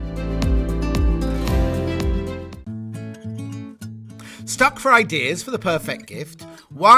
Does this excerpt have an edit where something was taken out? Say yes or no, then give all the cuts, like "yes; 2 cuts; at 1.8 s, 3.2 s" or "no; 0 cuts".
yes; 1 cut; at 2.6 s